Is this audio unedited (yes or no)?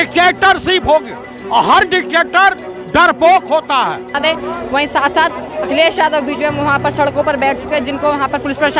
no